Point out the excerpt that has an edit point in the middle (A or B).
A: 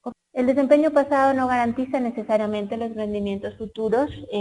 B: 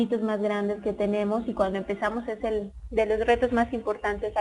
A